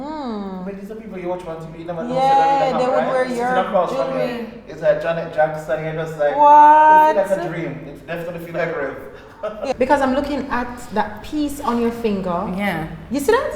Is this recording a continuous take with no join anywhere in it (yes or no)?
no